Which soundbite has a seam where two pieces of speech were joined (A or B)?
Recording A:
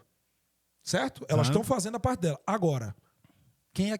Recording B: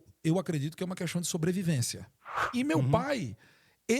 B